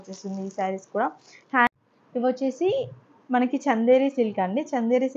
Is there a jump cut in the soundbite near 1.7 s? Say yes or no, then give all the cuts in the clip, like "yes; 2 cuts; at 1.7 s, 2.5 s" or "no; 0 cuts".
yes; 1 cut; at 1.7 s